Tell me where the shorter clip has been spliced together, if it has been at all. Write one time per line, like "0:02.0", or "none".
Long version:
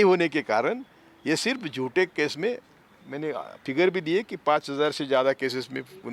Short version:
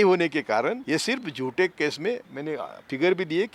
0:00.8
0:02.3